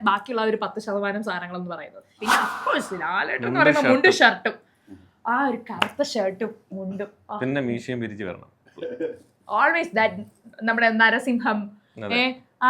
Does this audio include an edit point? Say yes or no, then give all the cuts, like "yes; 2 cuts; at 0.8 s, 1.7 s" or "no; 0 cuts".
yes; 1 cut; at 2.1 s